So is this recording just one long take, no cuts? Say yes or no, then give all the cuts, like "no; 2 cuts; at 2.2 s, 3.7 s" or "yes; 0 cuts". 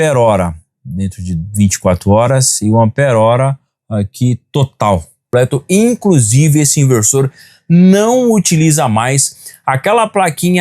no; 1 cut; at 5.3 s